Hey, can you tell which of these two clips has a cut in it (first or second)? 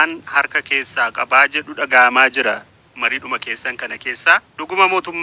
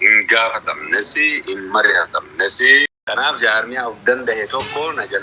second